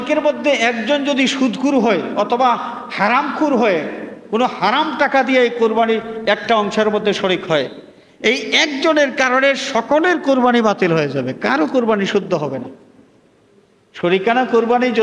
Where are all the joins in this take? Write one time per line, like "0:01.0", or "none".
none